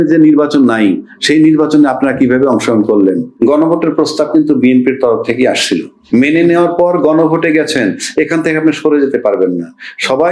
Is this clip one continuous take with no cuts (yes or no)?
no